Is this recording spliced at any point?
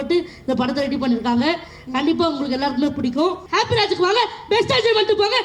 yes; 1 cut; at 3.4 s

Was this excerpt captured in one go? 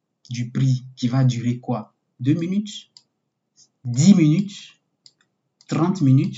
yes; 0 cuts

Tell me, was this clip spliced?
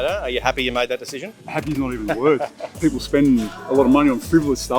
yes; 2 cuts; at 1.4 s, 2.6 s

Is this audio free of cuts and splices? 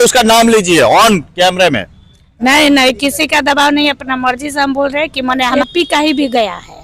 no; 1 cut; at 5.6 s

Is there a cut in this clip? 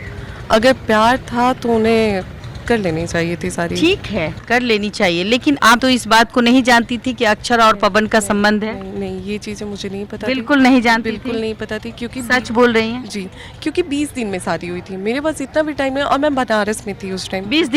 no; 0 cuts

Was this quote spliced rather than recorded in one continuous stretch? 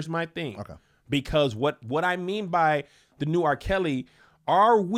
no; 0 cuts

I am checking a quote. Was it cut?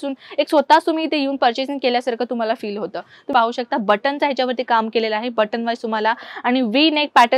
yes; 1 cut; at 3.3 s

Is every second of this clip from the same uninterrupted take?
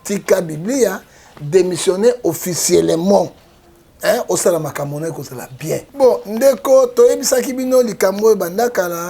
no; 1 cut; at 5.9 s

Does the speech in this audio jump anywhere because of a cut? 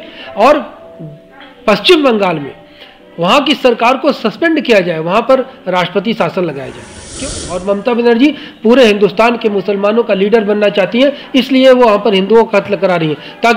yes; 1 cut; at 7.1 s

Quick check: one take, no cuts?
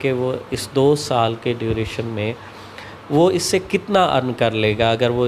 yes; 0 cuts

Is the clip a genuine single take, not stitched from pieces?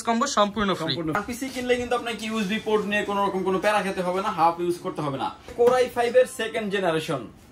no; 2 cuts; at 1.2 s, 5.5 s

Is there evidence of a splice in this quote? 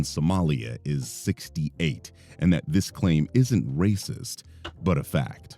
yes; 1 cut; at 2.7 s

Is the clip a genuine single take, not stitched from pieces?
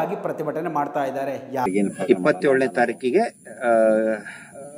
no; 1 cut; at 1.7 s

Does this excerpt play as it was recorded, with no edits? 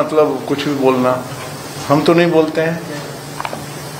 yes; 0 cuts

